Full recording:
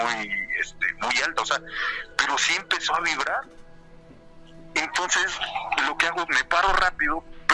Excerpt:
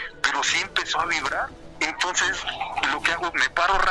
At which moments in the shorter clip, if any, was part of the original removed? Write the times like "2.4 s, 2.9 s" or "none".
1.6 s